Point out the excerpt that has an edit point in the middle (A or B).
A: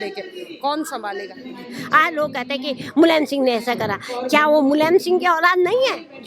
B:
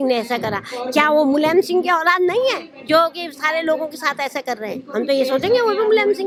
A